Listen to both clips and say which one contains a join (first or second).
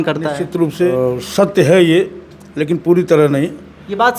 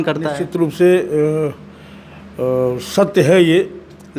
first